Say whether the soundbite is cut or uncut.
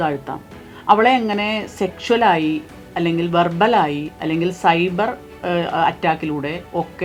uncut